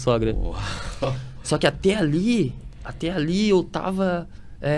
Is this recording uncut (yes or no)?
yes